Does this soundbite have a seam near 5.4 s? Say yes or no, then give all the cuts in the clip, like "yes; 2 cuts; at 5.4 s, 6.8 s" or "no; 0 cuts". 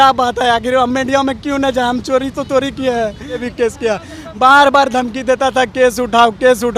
no; 1 cut; at 3.5 s